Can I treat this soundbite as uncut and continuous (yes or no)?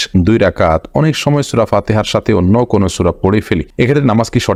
yes